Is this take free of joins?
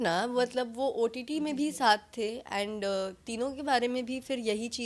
yes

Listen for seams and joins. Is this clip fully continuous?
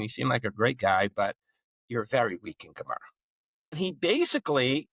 no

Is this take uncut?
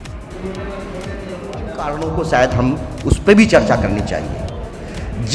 no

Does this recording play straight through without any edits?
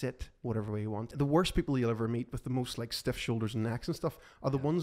no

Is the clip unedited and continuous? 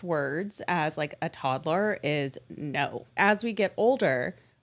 no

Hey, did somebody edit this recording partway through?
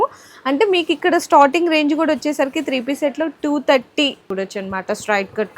yes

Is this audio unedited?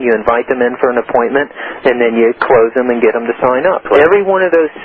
no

